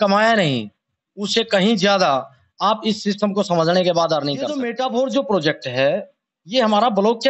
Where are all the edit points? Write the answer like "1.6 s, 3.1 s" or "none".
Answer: 4.5 s

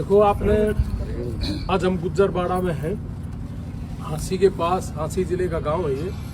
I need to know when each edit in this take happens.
1.6 s

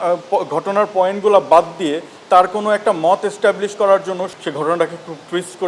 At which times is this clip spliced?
4.3 s

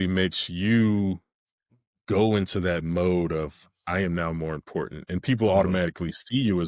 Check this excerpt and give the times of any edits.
none

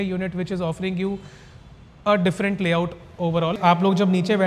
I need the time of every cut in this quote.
3.6 s

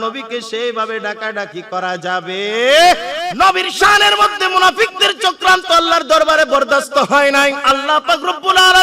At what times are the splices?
3.3 s, 7.6 s

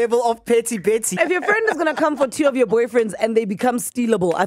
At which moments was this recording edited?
1.1 s

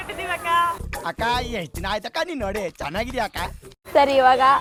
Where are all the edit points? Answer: none

